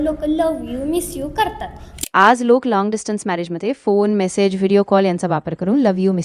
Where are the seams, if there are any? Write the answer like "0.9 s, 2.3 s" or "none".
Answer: 2.0 s